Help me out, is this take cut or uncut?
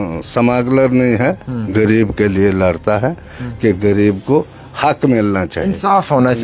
uncut